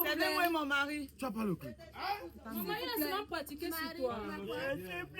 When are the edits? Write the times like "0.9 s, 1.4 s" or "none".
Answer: 4.3 s